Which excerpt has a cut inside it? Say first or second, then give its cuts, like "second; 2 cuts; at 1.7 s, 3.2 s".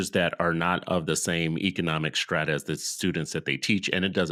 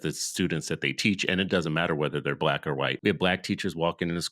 second; 1 cut; at 3.0 s